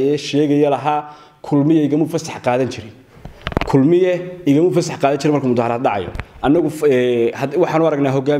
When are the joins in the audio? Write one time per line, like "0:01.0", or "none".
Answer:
none